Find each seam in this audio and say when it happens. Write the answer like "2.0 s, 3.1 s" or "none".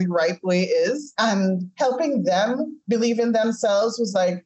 1.1 s, 2.7 s